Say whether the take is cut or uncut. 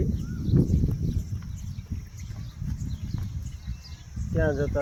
uncut